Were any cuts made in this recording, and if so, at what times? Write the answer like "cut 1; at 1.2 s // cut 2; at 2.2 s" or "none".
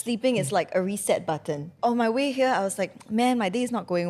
cut 1; at 1.7 s